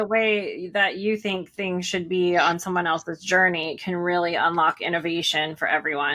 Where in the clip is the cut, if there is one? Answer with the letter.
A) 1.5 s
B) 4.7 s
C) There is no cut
C